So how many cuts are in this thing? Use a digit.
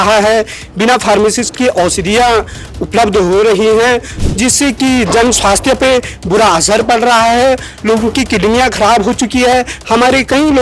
1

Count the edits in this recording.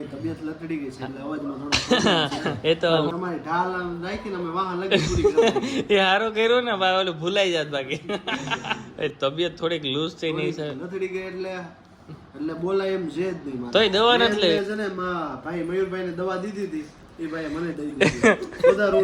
3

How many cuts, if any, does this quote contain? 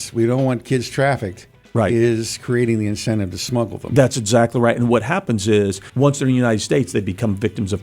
1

